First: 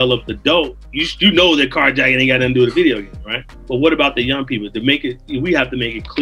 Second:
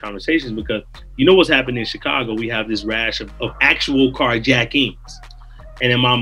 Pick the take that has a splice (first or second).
first